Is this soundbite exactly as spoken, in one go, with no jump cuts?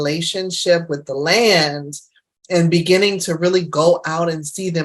yes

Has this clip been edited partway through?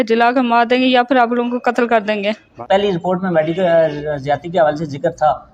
yes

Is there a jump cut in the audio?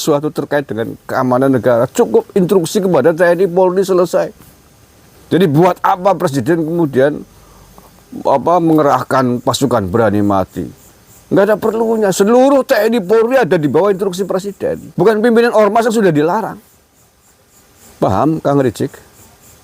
yes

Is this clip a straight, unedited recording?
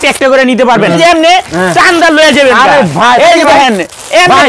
no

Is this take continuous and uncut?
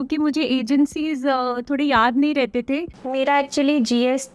no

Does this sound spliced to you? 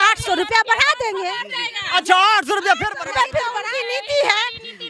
yes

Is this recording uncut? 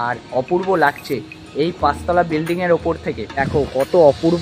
no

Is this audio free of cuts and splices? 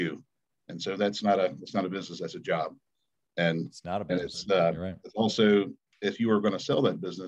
yes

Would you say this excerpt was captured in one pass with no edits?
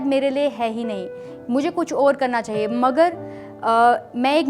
yes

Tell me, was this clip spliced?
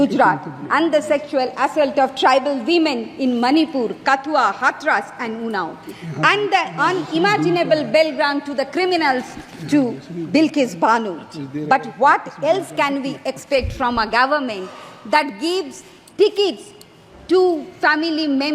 no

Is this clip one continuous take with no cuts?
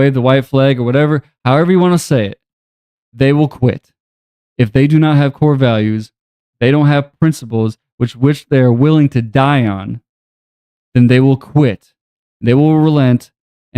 yes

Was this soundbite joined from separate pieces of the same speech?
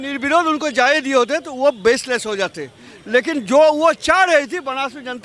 no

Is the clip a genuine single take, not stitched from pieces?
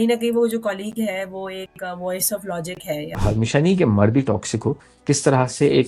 no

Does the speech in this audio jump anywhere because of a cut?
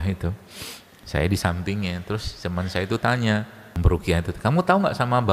yes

